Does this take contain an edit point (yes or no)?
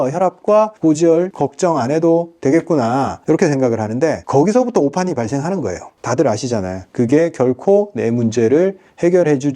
yes